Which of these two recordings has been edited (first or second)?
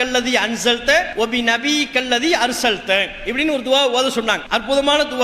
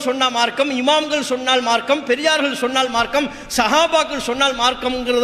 first